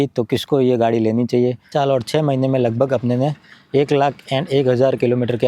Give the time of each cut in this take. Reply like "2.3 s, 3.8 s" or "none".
1.7 s